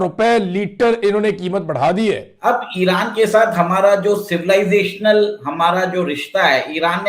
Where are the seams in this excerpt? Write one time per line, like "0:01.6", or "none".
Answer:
0:02.3